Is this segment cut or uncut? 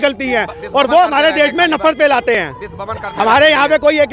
uncut